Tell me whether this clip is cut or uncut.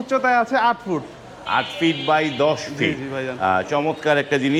uncut